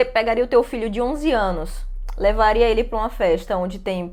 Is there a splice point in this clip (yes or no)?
no